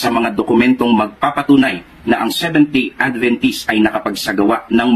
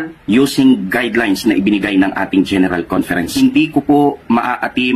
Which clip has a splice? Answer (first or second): second